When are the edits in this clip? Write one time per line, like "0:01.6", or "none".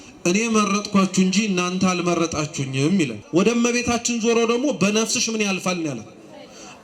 0:03.2